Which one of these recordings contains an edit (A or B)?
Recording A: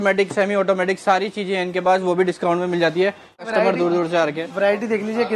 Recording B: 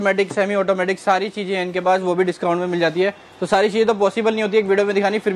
A